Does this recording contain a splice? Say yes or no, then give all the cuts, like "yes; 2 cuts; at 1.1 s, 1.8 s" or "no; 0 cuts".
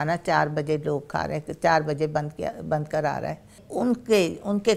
yes; 1 cut; at 3.6 s